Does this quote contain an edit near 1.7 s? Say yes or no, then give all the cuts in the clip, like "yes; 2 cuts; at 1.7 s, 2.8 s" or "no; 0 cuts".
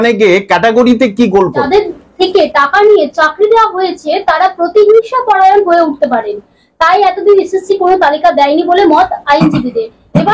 yes; 1 cut; at 1.7 s